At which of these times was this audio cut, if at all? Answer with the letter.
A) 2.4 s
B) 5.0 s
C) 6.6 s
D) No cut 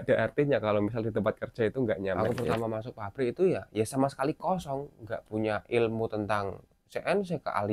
A